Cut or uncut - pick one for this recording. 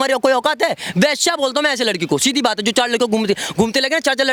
uncut